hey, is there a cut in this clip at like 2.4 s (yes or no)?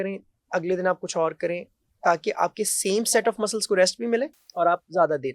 no